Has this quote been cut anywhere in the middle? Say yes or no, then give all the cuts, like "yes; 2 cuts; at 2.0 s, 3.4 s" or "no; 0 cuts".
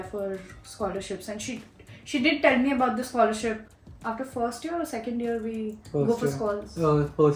no; 0 cuts